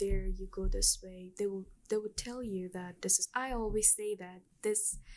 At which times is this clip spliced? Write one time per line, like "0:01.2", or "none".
0:03.2